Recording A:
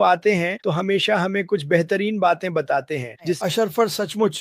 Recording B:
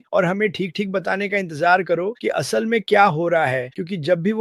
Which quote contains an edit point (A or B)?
A